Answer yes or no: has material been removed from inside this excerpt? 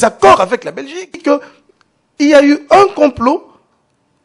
yes